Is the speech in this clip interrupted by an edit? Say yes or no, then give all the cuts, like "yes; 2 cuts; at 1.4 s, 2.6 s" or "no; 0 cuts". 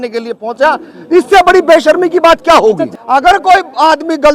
yes; 1 cut; at 3.0 s